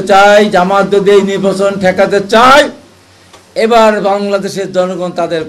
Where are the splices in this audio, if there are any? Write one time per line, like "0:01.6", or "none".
none

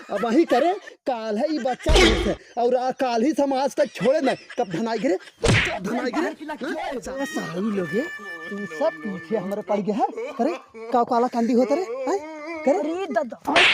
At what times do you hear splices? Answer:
0:07.1

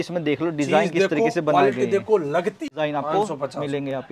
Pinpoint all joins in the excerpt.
0:02.6

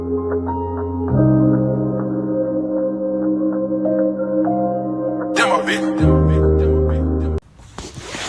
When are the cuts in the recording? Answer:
0:07.4

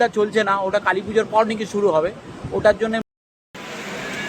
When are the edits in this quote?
0:03.0

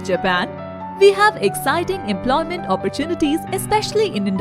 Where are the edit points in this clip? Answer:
none

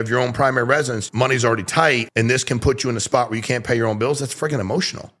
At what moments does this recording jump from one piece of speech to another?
0:01.0
0:02.1

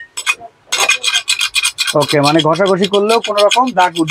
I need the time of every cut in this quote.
none

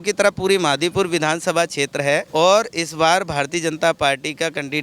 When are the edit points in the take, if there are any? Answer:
0:02.3

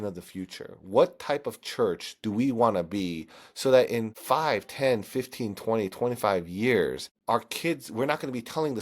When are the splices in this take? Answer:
0:04.1
0:07.1

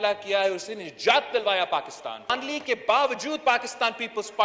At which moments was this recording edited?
0:02.3

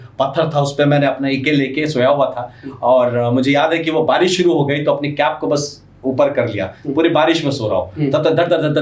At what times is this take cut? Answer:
none

